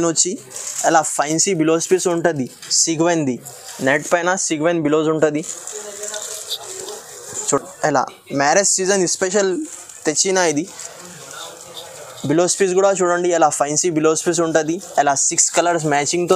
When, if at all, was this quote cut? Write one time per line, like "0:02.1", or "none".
none